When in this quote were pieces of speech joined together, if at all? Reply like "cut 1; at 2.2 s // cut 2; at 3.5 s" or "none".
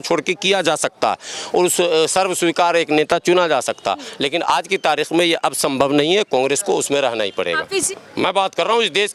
cut 1; at 7.6 s